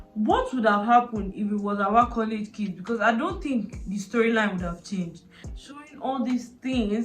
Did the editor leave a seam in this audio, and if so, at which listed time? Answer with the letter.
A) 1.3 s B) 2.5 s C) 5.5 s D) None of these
C